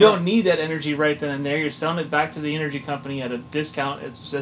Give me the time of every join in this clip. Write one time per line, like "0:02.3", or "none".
none